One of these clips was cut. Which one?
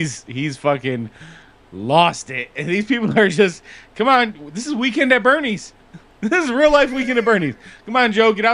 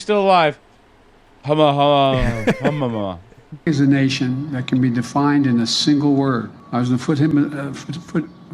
second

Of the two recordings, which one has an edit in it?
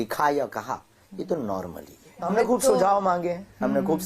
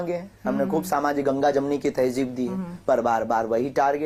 first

